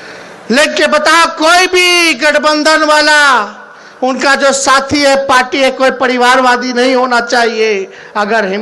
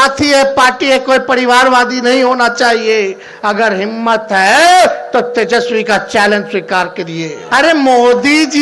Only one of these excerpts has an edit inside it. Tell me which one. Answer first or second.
second